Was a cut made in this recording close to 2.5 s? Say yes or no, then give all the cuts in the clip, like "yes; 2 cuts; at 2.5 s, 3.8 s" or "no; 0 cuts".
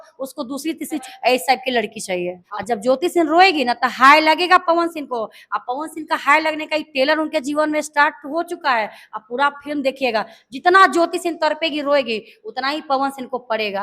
yes; 2 cuts; at 1.1 s, 2.5 s